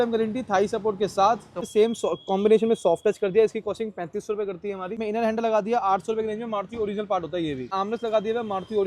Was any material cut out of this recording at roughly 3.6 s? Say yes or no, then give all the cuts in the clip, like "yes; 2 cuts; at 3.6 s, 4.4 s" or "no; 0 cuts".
no; 3 cuts; at 1.6 s, 5.0 s, 7.7 s